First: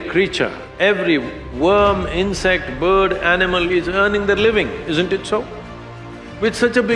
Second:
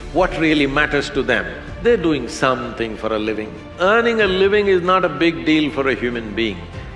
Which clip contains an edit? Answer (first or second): second